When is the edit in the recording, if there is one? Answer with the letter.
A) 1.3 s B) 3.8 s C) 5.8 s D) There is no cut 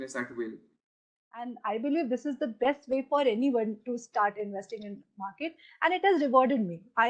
A